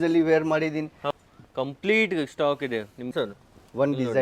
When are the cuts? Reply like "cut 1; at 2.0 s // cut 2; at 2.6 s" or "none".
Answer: cut 1; at 1.0 s // cut 2; at 3.1 s